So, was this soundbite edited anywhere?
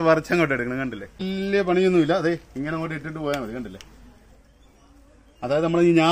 yes; 1 cut; at 1.3 s

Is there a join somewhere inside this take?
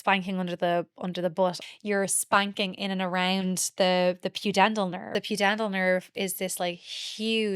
yes; 2 cuts; at 1.6 s, 5.0 s

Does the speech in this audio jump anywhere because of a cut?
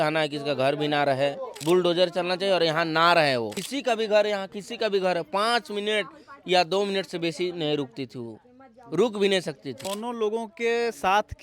yes; 3 cuts; at 1.6 s, 3.6 s, 9.8 s

